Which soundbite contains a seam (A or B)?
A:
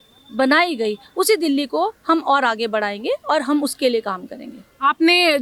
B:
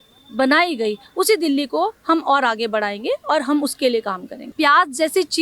B